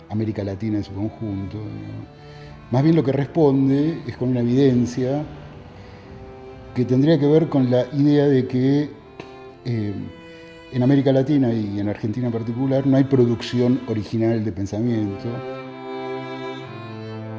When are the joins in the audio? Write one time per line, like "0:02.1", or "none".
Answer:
0:07.9